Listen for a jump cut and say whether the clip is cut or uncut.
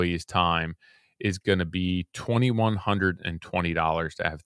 uncut